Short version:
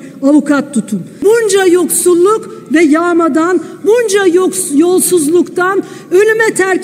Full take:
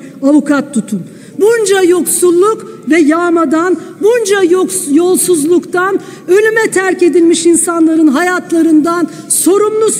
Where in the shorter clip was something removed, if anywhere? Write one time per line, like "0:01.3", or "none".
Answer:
0:01.0